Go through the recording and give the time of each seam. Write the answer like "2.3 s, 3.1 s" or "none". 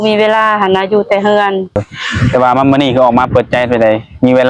1.8 s